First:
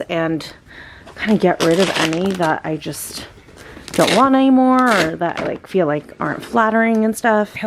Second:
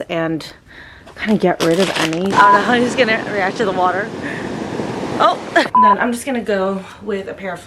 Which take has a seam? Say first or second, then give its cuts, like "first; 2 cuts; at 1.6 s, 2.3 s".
second; 2 cuts; at 2.3 s, 5.7 s